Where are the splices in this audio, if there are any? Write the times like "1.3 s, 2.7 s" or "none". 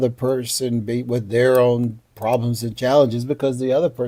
none

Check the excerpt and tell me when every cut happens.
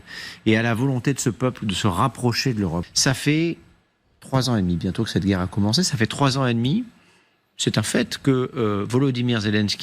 2.9 s

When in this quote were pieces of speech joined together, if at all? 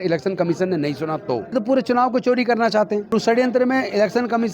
1.5 s, 3.1 s

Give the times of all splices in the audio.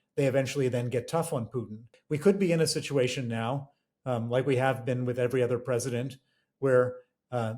1.9 s

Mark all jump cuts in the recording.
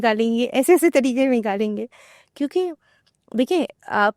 none

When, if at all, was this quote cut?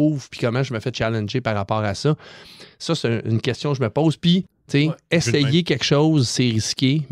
4.6 s

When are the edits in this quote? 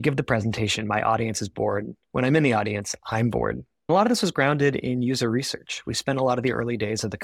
3.9 s

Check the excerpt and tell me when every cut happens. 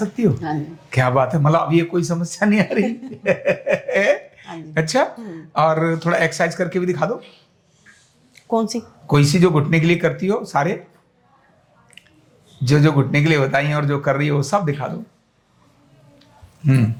none

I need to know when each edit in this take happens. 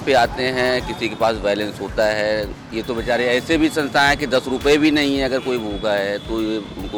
none

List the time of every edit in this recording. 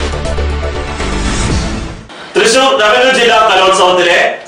1.9 s

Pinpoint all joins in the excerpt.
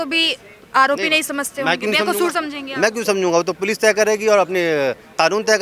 none

